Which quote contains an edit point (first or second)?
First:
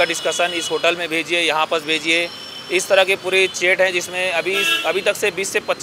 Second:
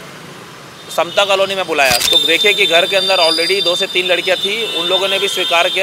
second